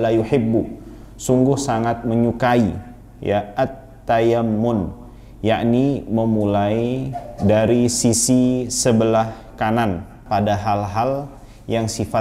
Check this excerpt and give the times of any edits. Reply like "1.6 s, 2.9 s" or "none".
10.2 s